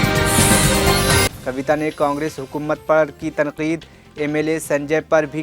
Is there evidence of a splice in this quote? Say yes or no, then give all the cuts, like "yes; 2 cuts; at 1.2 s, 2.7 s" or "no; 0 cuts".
yes; 1 cut; at 1.2 s